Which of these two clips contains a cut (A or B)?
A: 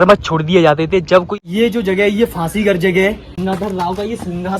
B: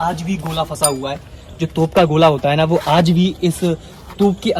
A